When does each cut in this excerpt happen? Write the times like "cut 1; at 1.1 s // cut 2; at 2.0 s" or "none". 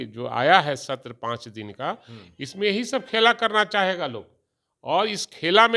none